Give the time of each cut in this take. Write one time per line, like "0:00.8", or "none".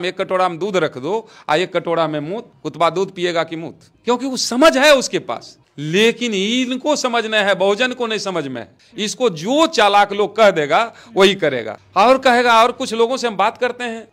none